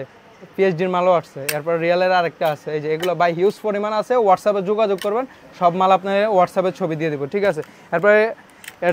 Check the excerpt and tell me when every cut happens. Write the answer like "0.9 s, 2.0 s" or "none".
none